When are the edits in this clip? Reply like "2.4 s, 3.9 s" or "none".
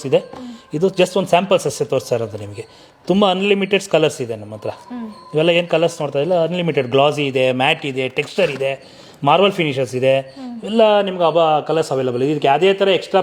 none